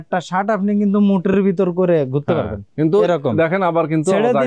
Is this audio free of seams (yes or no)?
yes